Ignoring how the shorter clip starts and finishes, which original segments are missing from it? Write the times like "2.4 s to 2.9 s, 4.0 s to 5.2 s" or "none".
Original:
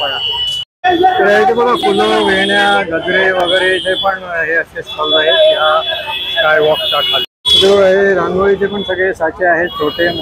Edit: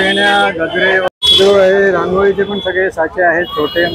3.4 s to 7.3 s